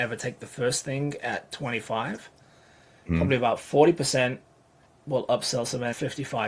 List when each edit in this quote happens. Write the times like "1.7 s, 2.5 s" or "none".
none